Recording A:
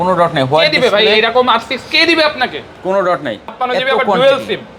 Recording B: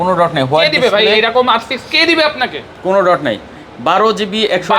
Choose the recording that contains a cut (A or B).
A